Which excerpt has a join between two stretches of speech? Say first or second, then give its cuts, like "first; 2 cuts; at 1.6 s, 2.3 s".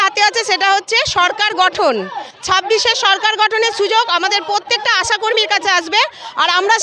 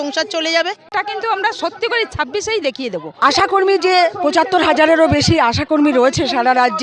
second; 2 cuts; at 0.9 s, 3.2 s